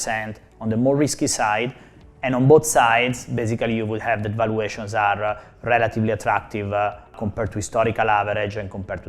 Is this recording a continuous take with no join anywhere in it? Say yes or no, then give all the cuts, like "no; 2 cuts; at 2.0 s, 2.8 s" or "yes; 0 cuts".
no; 1 cut; at 7.2 s